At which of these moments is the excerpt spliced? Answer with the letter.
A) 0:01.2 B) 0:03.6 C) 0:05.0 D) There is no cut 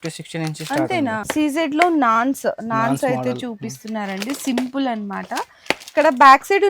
A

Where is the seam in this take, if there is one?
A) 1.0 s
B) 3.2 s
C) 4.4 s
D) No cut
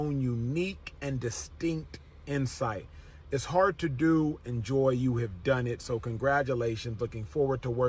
B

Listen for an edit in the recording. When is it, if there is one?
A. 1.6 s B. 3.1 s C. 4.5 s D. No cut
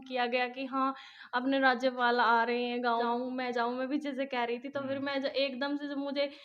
B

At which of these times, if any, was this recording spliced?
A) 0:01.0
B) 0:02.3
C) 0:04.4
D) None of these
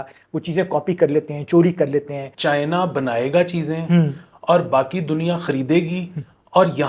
B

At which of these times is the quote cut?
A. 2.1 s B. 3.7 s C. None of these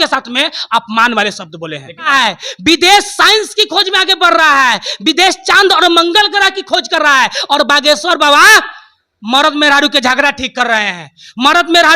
A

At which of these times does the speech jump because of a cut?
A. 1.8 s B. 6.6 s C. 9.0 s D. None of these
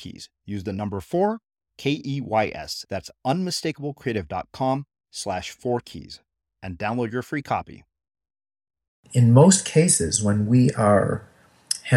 C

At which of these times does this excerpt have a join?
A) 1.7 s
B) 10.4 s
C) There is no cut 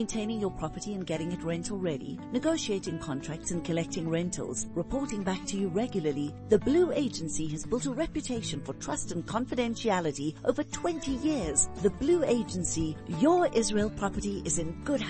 C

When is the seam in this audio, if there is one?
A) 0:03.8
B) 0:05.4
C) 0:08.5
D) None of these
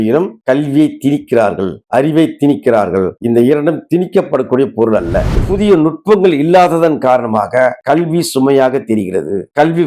B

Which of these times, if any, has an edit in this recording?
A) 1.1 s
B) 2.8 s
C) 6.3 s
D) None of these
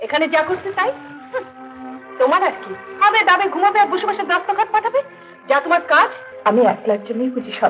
C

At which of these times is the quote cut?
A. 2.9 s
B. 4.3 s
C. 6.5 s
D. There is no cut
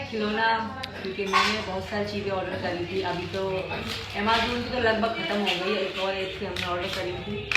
D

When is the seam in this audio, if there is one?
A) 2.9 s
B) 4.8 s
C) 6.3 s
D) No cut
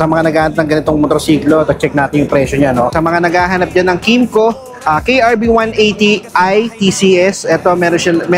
A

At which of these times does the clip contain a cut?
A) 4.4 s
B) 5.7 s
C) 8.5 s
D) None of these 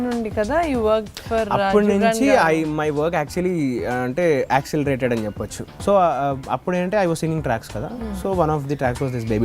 B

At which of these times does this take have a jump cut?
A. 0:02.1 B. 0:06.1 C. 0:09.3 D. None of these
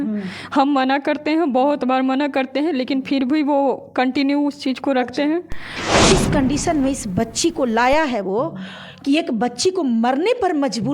B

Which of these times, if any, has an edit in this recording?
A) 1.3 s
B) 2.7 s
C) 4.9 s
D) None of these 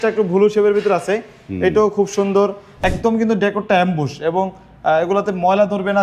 B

